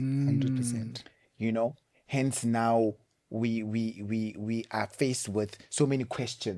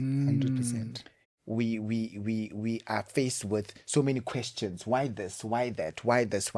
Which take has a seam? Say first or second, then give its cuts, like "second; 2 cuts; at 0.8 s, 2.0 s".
second; 1 cut; at 1.2 s